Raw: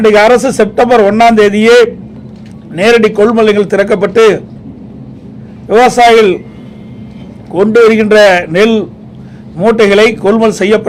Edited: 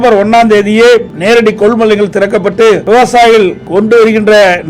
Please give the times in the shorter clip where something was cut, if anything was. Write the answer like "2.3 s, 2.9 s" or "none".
1.1 s, 2.8 s, 3.6 s